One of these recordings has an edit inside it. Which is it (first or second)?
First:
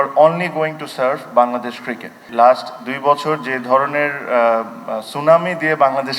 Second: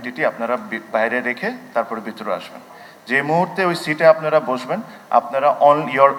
first